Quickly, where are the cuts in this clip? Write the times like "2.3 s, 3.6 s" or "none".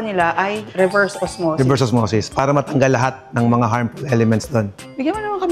none